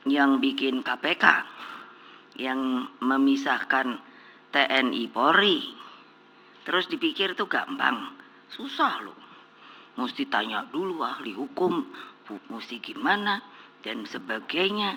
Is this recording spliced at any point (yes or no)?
no